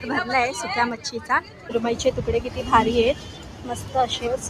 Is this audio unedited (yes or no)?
no